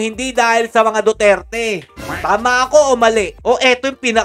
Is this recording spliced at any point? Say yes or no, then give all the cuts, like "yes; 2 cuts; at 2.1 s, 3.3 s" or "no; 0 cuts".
no; 0 cuts